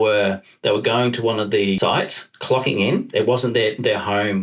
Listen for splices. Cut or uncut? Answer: cut